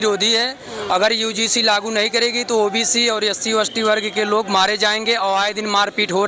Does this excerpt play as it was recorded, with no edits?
yes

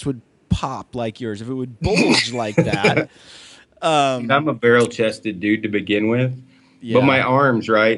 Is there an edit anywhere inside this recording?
no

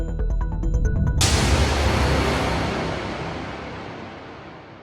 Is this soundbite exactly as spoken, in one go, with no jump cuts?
no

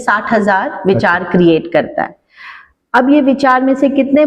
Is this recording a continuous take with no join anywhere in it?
yes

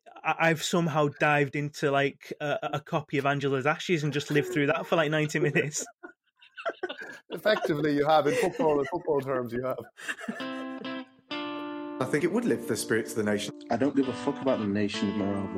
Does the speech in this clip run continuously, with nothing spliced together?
no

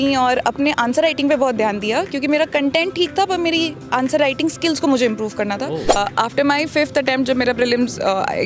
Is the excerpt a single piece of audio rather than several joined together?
no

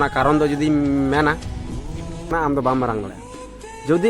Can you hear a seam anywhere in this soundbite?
yes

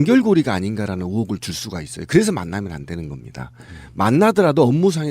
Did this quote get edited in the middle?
yes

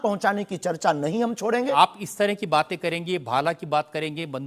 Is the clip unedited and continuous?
no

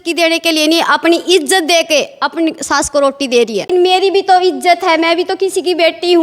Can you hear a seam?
yes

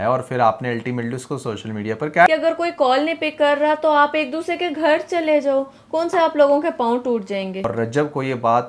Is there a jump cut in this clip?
yes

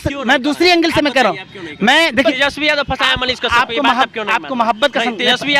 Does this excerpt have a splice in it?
yes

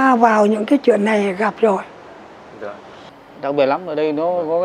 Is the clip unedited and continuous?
no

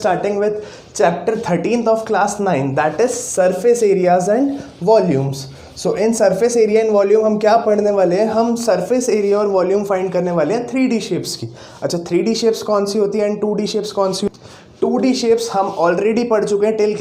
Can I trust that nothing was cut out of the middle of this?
no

